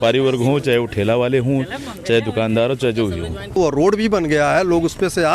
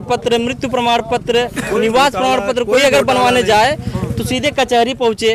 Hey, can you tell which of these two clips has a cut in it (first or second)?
first